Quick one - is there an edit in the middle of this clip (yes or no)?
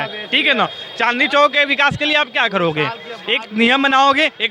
no